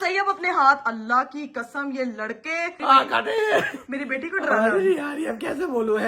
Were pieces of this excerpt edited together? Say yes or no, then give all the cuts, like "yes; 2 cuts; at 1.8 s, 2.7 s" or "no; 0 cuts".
yes; 1 cut; at 2.8 s